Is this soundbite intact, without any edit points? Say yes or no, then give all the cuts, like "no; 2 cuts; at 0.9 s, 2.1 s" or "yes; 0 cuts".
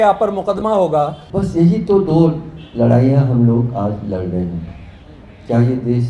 no; 1 cut; at 1.2 s